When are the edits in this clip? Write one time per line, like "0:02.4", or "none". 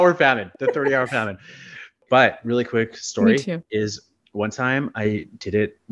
0:02.0